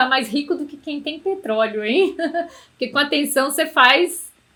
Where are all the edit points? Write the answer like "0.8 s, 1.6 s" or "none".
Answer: none